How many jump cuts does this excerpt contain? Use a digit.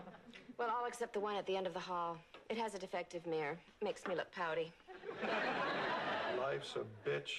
1